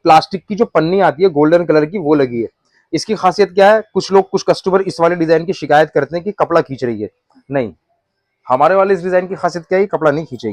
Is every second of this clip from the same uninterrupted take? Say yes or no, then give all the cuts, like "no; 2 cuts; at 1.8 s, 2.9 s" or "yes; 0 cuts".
yes; 0 cuts